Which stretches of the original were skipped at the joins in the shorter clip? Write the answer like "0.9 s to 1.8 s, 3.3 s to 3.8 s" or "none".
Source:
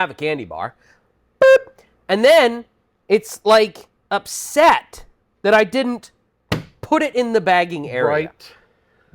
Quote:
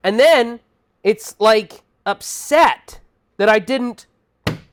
none